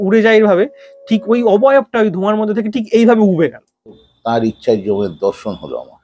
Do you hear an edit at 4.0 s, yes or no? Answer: yes